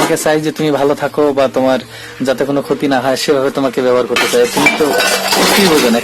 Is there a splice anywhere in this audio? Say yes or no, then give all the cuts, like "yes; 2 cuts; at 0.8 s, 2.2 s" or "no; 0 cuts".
no; 0 cuts